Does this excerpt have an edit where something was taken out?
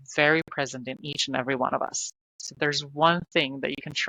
no; 0 cuts

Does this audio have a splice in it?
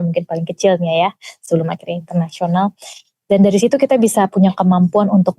no; 0 cuts

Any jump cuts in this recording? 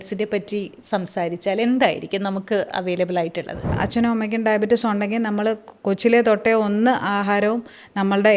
yes; 1 cut; at 3.8 s

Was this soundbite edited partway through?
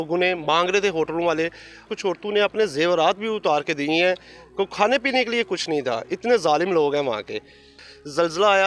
yes; 2 cuts; at 1.9 s, 7.6 s

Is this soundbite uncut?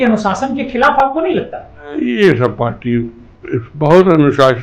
no; 1 cut; at 1.9 s

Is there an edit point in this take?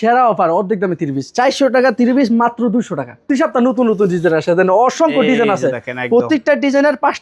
yes; 1 cut; at 3.3 s

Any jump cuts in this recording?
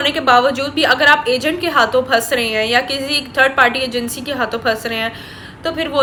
no; 0 cuts

